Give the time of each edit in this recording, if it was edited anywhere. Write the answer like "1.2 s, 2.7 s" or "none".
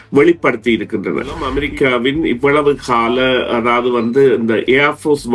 1.6 s

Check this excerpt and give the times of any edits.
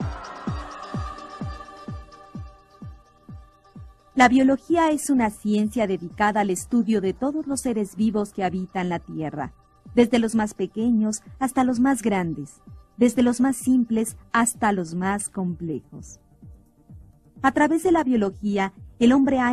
8.9 s

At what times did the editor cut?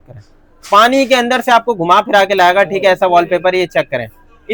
none

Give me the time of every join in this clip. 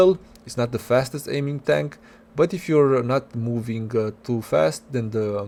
none

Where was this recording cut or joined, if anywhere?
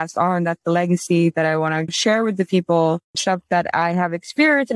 2.0 s, 3.1 s

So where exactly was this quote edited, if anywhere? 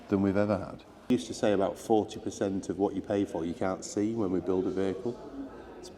1.1 s

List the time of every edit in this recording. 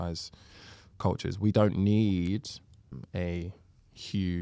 3.0 s

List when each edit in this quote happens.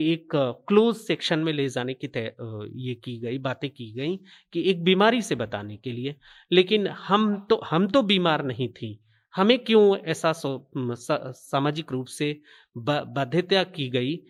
none

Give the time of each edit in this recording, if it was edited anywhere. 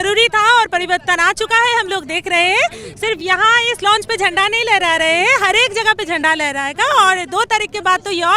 none

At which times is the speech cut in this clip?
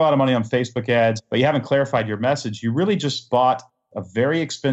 1.2 s

